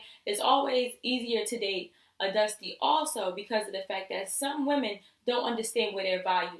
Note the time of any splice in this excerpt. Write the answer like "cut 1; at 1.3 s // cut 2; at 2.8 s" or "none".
none